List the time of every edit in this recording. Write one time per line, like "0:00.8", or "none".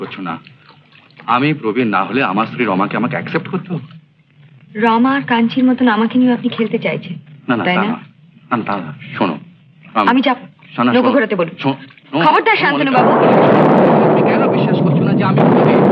none